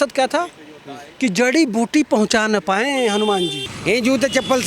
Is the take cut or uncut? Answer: cut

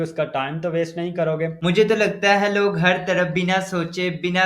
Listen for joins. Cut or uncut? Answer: cut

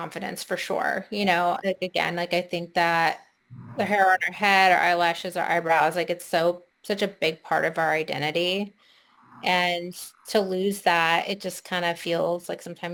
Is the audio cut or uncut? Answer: uncut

